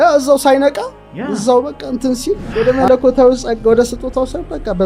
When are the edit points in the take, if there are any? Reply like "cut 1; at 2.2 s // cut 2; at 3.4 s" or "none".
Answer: cut 1; at 2.5 s